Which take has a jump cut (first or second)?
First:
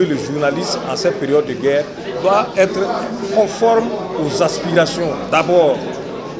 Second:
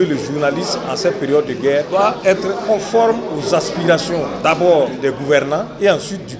second